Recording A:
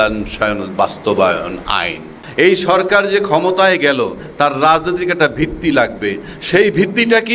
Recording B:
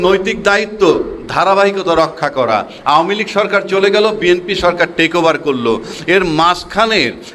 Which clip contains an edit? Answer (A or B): A